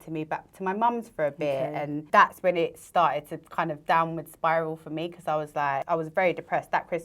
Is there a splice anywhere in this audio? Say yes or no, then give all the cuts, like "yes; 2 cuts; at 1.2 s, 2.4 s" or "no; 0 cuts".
yes; 2 cuts; at 2.0 s, 5.8 s